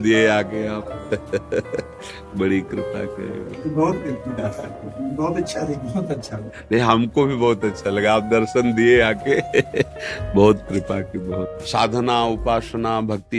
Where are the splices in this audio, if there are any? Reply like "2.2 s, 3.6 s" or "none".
3.5 s, 11.6 s